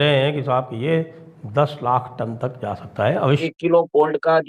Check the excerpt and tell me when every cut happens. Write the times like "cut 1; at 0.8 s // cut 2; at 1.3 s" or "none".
cut 1; at 3.4 s